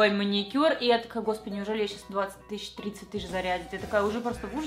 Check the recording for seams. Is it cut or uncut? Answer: uncut